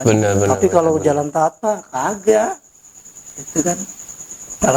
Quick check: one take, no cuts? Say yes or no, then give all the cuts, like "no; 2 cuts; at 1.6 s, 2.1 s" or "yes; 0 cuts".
yes; 0 cuts